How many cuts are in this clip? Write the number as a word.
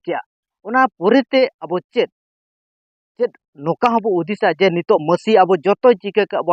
zero